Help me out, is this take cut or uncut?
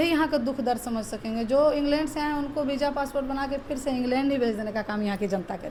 uncut